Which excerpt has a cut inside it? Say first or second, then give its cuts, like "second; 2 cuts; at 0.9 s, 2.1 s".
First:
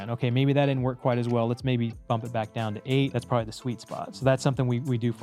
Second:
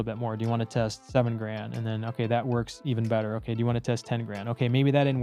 first; 1 cut; at 3.1 s